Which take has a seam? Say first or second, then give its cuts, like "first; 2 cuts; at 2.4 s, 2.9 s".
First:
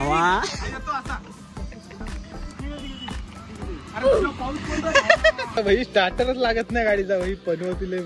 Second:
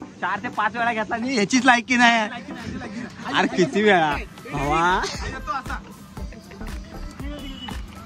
first; 1 cut; at 5.6 s